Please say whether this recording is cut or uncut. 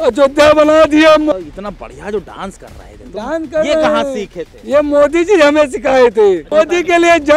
cut